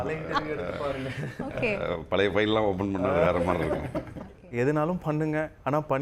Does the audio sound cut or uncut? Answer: cut